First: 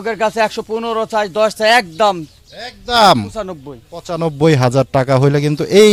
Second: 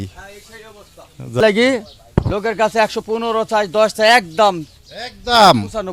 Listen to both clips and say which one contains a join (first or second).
second